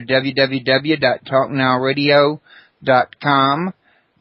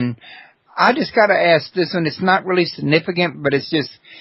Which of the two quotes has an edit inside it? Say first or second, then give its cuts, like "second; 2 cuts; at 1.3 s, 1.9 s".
first; 1 cut; at 1.2 s